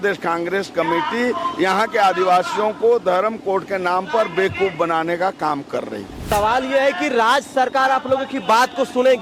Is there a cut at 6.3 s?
yes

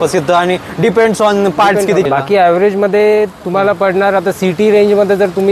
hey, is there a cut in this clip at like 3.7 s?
no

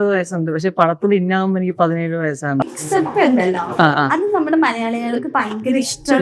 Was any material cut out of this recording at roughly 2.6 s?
yes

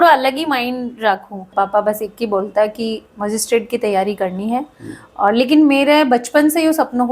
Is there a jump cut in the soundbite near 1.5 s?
yes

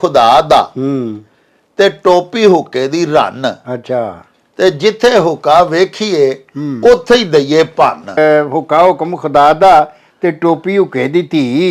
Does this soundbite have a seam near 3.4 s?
no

